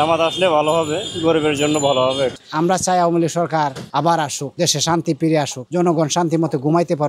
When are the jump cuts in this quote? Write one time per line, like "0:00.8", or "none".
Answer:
0:02.3